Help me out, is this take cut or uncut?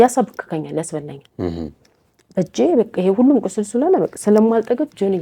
uncut